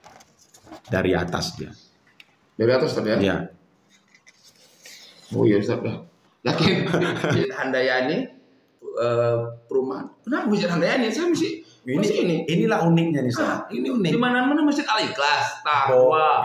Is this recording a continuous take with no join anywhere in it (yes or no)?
no